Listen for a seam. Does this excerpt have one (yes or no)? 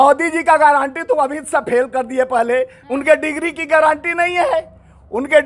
no